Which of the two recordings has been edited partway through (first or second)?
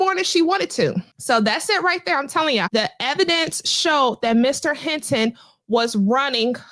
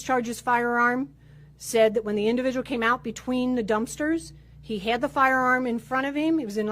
first